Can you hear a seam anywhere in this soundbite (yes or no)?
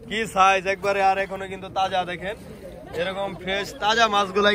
no